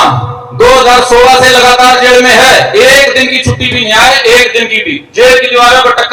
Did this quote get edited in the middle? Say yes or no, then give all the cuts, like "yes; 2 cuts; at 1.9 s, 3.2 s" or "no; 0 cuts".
no; 0 cuts